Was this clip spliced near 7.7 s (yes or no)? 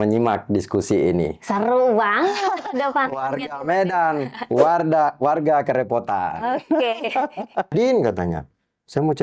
yes